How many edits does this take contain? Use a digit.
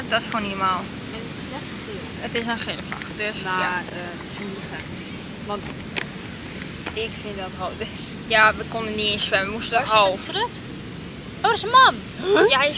0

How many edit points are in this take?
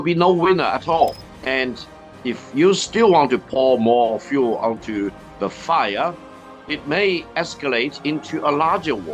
1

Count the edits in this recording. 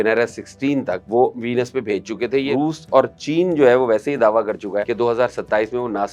3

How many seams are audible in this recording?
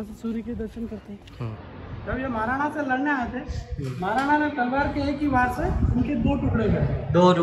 1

